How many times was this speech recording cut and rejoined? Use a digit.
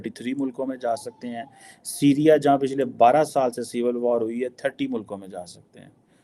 0